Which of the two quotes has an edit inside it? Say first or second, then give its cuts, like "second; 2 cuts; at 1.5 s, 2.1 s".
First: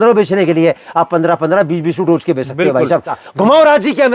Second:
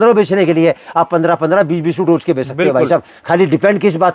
first; 1 cut; at 3.2 s